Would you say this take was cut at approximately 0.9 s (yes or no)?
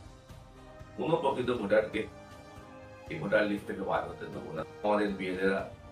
no